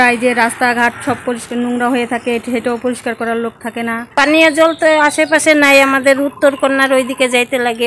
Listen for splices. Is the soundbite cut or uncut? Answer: cut